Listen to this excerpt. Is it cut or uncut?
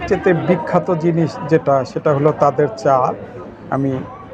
uncut